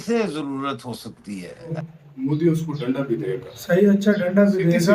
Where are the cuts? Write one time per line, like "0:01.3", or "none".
0:01.7